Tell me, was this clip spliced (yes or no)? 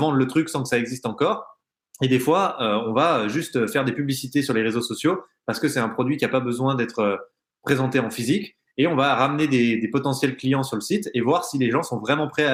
no